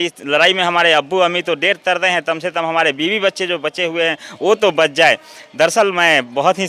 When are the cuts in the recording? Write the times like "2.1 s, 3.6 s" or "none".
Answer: none